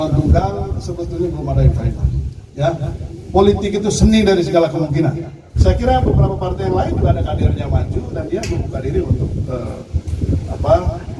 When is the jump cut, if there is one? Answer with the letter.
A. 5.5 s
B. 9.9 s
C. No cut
A